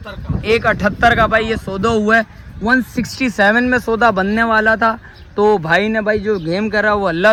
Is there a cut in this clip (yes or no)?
no